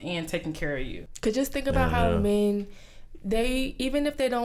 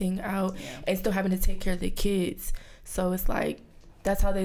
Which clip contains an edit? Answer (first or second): first